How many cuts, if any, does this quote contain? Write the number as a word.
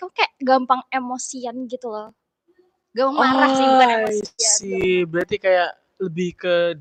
zero